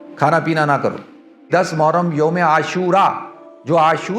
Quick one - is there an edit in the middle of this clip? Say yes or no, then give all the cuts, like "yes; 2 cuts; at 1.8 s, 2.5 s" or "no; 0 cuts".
yes; 1 cut; at 1.5 s